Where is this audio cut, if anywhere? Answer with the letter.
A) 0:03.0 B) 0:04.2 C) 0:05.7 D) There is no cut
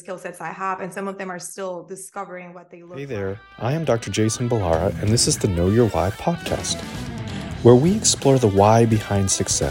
A